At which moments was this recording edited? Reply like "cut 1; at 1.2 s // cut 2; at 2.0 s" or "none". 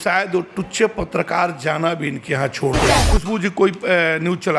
cut 1; at 3.0 s